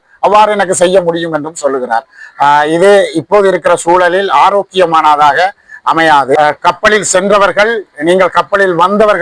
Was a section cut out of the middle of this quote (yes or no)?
yes